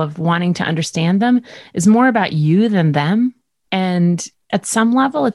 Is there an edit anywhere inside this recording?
yes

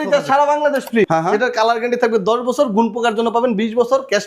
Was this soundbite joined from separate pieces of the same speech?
yes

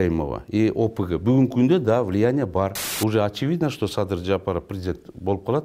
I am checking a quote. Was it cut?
yes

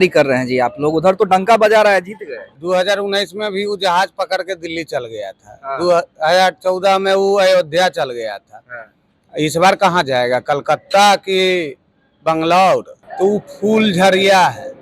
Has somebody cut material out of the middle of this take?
yes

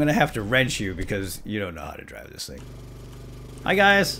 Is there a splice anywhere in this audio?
yes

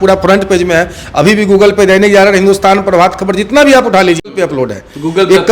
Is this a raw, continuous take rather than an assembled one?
no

